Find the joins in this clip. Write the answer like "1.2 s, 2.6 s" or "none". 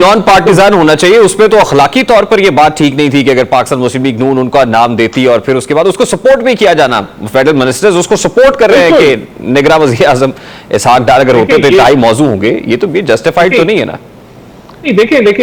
none